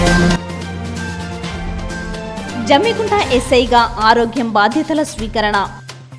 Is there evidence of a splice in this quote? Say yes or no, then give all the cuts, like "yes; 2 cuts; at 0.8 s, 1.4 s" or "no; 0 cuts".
no; 0 cuts